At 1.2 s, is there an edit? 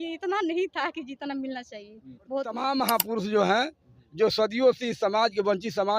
no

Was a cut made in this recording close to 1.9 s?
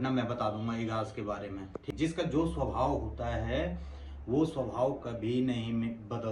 yes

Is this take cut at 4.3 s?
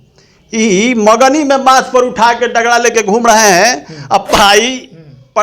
yes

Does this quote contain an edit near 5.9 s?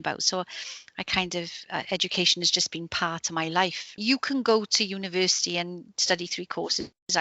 no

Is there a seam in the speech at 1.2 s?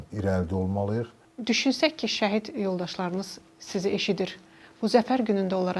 yes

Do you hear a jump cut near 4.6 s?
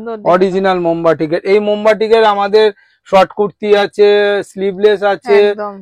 no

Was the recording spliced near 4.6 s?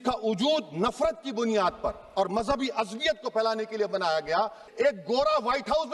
yes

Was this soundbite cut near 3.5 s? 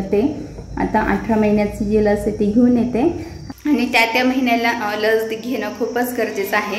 yes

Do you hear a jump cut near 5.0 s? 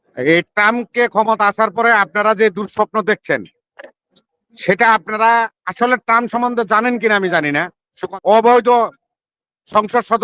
no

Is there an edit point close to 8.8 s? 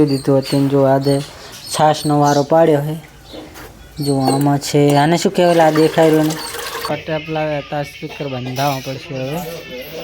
no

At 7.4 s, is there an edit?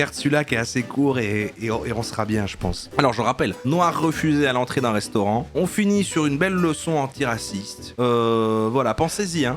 no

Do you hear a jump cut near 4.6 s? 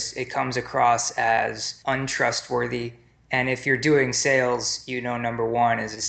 no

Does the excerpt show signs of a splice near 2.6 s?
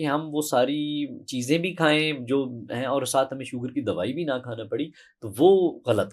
no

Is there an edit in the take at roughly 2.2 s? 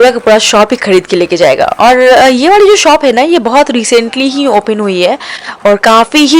no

